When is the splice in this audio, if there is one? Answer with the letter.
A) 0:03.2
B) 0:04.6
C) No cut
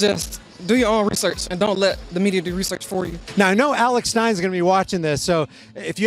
A